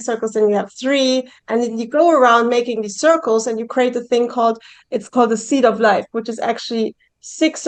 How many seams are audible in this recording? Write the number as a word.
zero